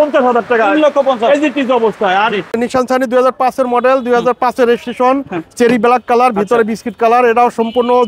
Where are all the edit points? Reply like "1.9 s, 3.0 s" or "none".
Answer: 2.6 s